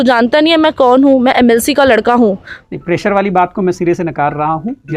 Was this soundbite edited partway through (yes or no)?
yes